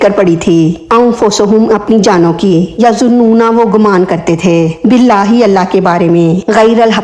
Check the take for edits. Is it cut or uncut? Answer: uncut